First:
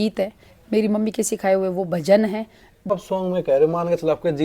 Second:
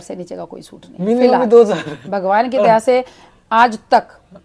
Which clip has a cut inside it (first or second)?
first